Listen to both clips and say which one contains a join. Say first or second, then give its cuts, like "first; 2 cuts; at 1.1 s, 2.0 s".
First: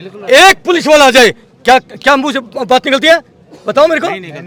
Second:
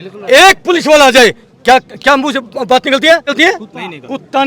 second; 1 cut; at 3.3 s